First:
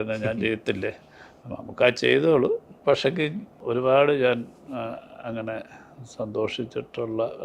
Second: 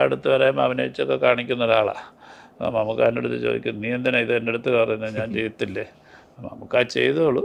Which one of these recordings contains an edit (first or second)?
first